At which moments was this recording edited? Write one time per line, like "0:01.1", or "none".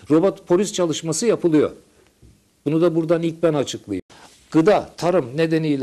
0:04.0